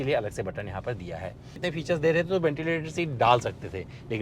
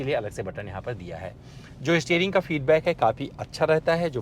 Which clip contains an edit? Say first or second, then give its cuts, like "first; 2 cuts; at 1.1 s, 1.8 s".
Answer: first; 1 cut; at 1.6 s